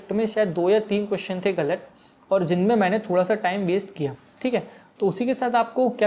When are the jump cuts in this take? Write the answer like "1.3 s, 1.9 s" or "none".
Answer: none